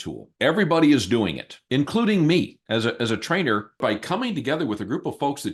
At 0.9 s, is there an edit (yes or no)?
no